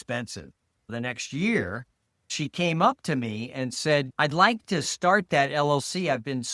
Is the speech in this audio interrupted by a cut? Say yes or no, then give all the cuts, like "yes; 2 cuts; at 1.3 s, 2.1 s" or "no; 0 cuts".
yes; 2 cuts; at 0.9 s, 2.3 s